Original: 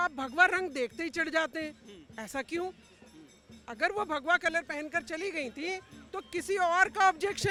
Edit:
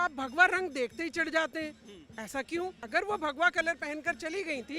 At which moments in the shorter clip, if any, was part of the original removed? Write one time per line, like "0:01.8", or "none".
0:02.8